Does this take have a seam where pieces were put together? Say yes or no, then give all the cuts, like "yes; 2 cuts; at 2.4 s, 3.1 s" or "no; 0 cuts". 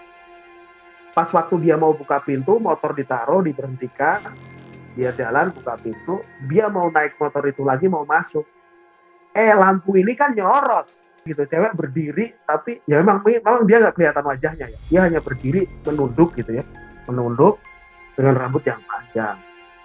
yes; 1 cut; at 11.3 s